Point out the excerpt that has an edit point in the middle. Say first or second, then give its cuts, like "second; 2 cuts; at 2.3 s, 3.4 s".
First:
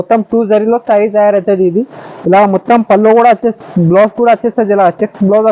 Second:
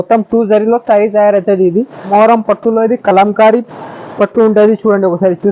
second; 1 cut; at 2.1 s